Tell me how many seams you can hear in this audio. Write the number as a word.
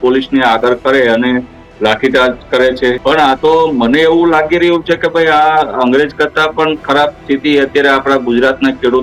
one